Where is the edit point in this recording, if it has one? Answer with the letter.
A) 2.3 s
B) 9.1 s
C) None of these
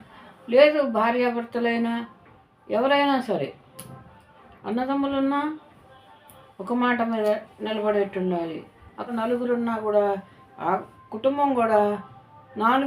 B